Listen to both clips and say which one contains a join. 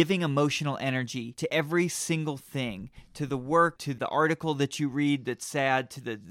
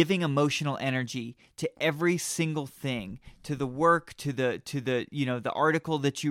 first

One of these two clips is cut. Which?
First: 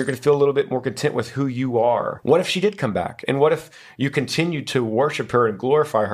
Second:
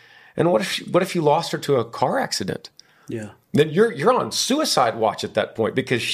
first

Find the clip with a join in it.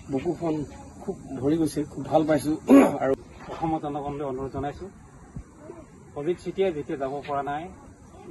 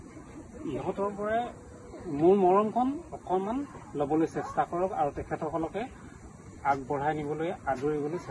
first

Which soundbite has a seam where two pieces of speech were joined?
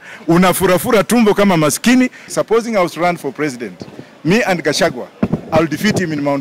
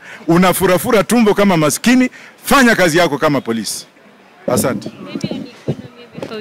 first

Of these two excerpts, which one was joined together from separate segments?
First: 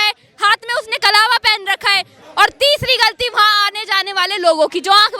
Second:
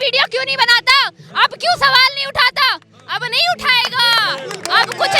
first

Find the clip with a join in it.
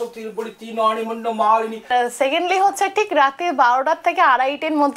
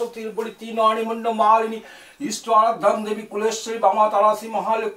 first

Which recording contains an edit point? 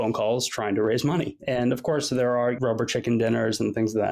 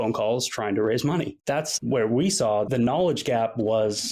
second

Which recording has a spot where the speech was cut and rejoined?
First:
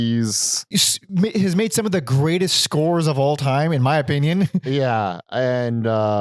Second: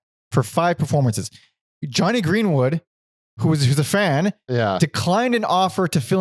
second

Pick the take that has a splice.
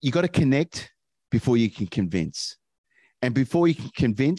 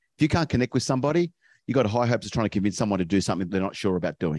second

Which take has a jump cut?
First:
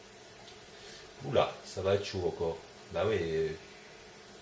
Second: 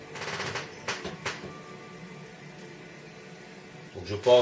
second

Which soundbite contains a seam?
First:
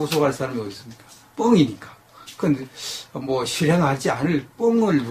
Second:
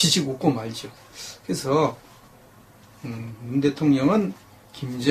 first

